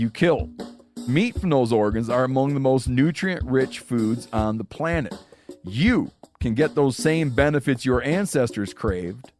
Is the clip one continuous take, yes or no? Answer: yes